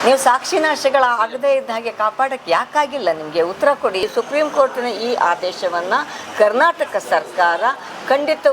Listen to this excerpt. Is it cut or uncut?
cut